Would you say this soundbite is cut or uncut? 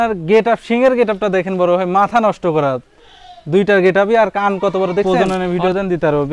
cut